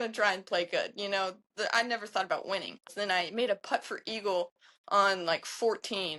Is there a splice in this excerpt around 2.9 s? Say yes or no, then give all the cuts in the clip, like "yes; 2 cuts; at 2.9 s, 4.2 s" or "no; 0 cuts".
yes; 1 cut; at 2.9 s